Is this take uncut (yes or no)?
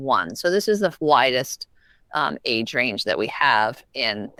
yes